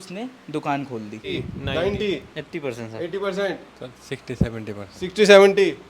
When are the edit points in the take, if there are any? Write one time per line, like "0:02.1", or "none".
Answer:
0:01.3